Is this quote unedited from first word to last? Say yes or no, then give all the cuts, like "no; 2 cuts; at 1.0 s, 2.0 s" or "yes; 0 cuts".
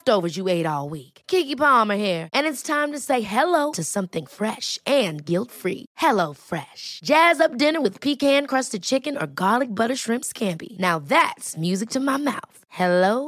yes; 0 cuts